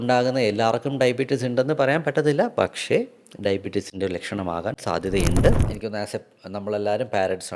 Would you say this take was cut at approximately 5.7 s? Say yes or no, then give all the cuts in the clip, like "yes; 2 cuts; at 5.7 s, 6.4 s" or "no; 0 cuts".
yes; 1 cut; at 5.7 s